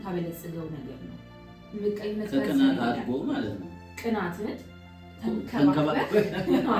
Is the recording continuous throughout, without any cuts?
yes; 0 cuts

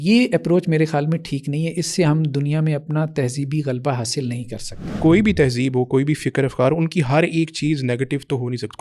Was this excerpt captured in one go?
no; 1 cut; at 4.9 s

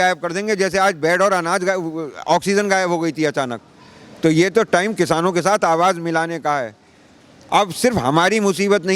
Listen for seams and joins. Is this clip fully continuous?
yes; 0 cuts

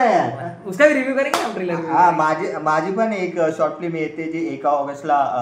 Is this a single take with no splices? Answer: yes; 0 cuts

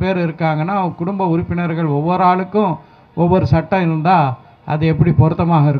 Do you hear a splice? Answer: no; 0 cuts

